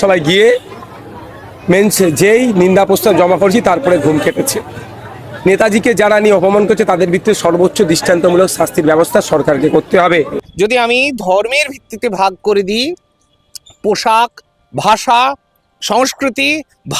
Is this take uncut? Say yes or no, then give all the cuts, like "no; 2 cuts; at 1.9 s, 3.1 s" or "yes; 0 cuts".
no; 1 cut; at 10.4 s